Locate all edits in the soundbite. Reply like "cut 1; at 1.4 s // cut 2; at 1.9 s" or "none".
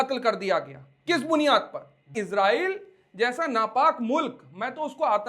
cut 1; at 2.2 s